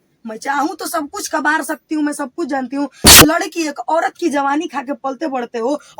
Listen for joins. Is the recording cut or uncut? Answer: cut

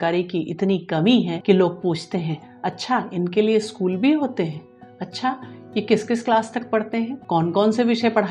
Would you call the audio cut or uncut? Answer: cut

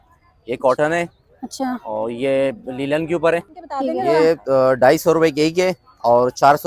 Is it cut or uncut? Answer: cut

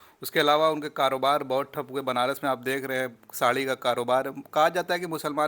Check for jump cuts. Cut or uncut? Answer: uncut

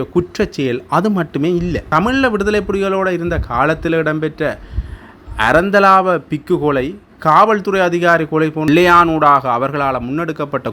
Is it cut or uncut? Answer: cut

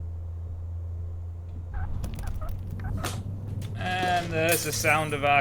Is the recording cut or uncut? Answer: uncut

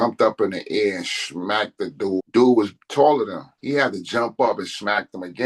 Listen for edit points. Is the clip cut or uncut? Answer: cut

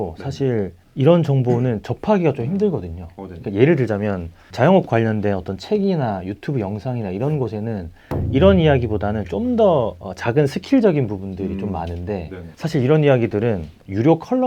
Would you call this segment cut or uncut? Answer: uncut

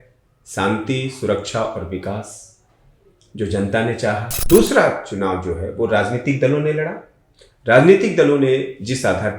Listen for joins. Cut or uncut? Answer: cut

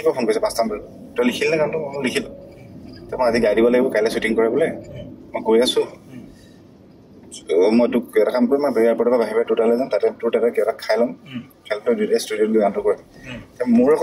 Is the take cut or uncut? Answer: uncut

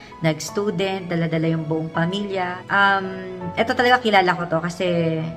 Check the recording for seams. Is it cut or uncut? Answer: uncut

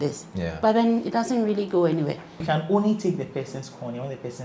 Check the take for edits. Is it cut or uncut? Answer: cut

